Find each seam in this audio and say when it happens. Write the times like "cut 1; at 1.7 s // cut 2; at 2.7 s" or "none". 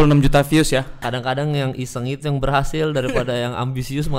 cut 1; at 1.0 s